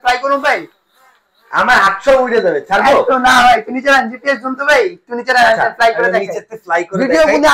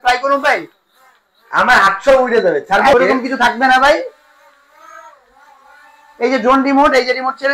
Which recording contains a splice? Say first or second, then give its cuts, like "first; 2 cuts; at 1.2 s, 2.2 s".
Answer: second; 1 cut; at 2.9 s